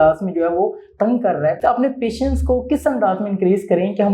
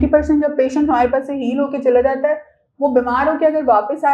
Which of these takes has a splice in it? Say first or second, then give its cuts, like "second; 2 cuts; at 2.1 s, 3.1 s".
first; 1 cut; at 1.6 s